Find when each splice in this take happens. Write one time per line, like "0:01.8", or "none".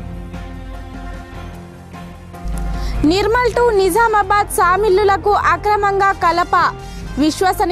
0:01.1